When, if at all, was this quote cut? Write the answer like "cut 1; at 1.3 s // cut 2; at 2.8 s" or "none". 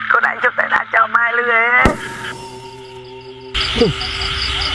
cut 1; at 2.1 s